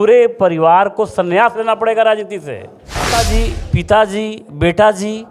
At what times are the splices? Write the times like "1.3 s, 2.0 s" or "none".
3.1 s